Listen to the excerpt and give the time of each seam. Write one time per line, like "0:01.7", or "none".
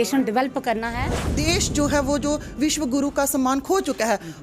0:01.3